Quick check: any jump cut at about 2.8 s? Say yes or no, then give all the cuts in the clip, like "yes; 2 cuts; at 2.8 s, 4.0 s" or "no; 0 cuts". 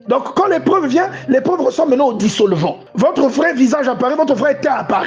yes; 1 cut; at 2.8 s